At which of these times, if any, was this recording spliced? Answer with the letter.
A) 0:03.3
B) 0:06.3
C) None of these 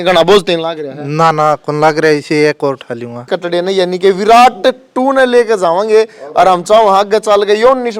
A